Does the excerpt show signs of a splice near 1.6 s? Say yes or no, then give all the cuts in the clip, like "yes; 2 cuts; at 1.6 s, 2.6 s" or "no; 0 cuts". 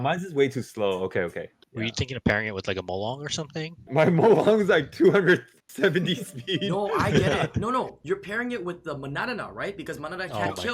yes; 3 cuts; at 1.6 s, 3.8 s, 8.0 s